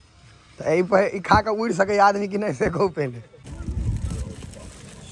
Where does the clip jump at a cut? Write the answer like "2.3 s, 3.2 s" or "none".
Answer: 3.5 s